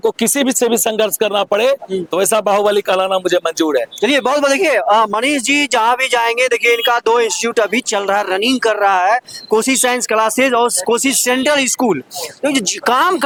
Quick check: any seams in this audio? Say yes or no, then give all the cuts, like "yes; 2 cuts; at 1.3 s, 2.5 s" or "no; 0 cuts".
no; 0 cuts